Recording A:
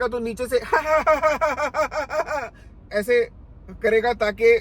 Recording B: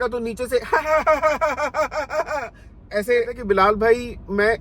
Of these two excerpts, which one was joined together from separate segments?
B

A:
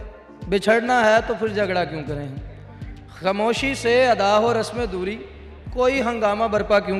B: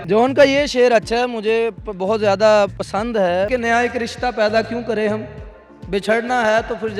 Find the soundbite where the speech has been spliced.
B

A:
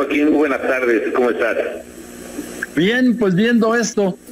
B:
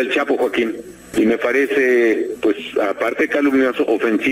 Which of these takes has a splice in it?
B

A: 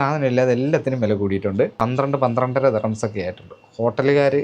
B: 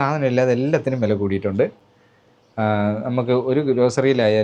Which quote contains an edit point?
A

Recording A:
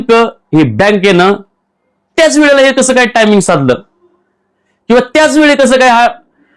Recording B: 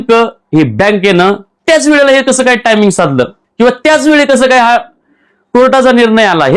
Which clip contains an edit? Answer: B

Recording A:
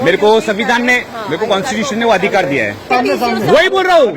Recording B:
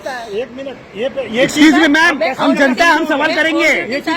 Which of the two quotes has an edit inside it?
A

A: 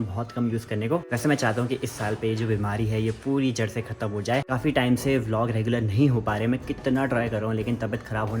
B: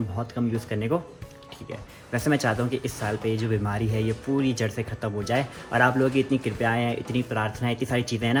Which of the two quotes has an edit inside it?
A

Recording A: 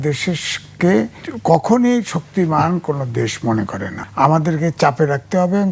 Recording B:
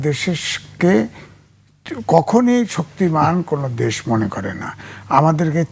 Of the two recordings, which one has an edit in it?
A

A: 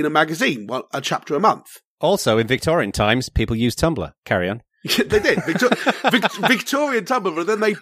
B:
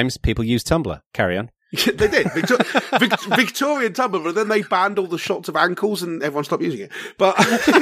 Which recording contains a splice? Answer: A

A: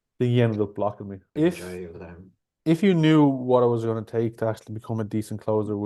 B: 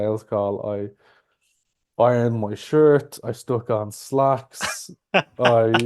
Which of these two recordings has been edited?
A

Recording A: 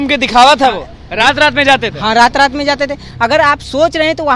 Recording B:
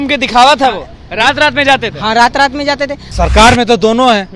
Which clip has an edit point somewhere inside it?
B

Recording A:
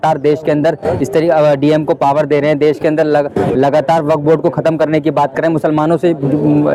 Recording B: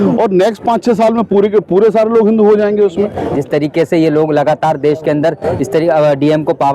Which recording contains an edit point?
B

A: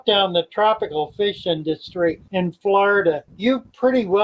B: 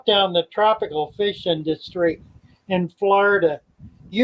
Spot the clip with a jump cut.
A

